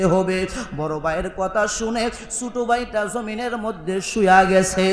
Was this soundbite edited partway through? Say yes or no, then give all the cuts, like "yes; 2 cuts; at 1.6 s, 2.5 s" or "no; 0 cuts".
no; 0 cuts